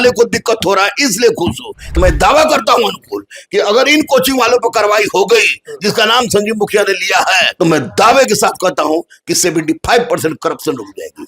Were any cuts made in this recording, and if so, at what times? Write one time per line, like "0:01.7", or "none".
0:02.0
0:07.5